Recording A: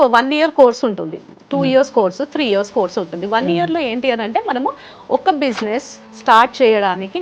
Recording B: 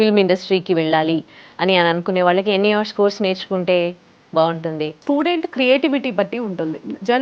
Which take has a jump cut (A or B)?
B